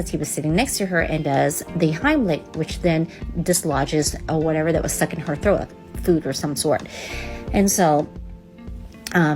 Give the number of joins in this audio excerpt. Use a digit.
0